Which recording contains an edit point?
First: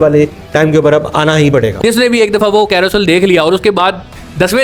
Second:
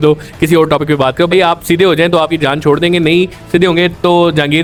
first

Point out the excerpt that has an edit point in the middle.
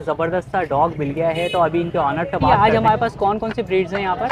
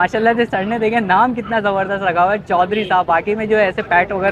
first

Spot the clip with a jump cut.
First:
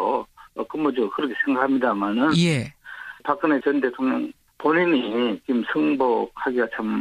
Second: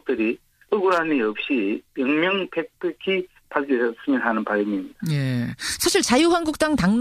second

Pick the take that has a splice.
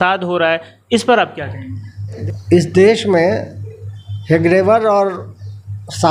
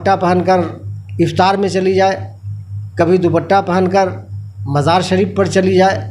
first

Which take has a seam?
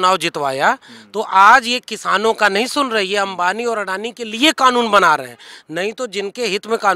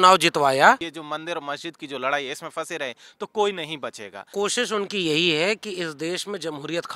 second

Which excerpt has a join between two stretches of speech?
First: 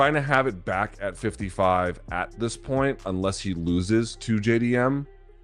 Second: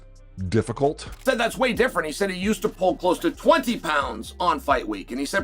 second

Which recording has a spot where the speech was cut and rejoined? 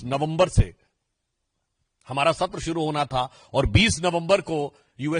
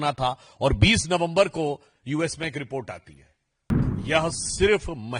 second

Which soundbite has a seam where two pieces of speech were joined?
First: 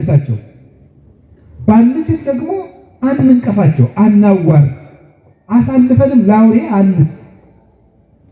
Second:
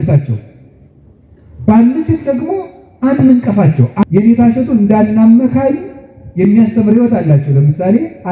second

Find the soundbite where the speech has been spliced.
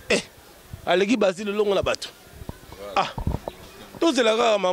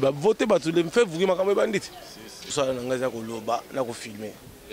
second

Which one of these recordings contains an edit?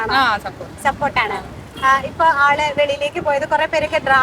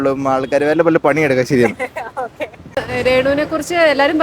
second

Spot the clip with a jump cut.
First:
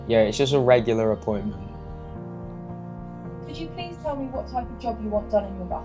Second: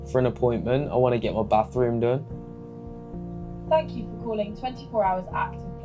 first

